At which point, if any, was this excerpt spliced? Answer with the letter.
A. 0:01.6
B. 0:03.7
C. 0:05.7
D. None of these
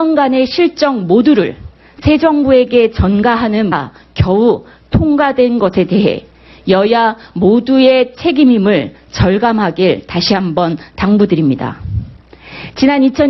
D